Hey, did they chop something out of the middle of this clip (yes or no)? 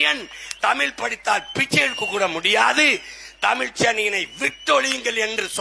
no